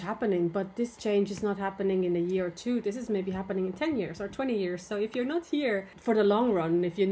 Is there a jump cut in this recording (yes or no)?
yes